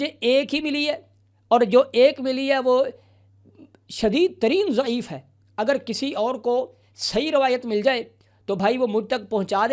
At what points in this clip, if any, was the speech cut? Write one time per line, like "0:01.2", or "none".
none

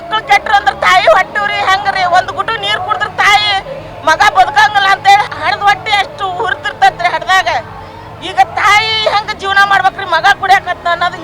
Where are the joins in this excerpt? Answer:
0:05.3

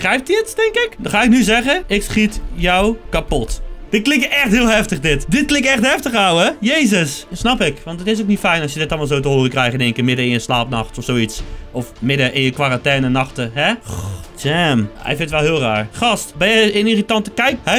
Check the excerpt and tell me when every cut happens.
0:07.3

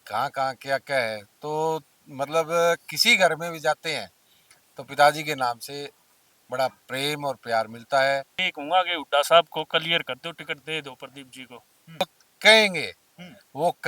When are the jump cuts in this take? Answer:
0:08.4
0:12.0

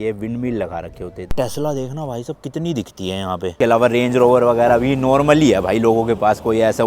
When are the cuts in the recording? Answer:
0:01.3
0:03.6

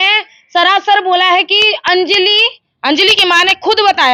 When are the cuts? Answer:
none

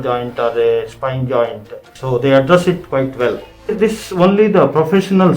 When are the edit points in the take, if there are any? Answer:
0:02.0
0:03.7

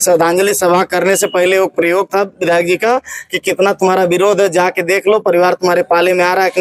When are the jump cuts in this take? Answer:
none

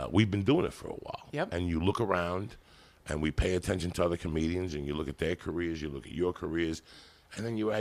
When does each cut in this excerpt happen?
none

